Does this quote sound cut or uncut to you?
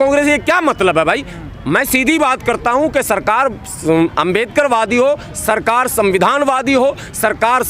uncut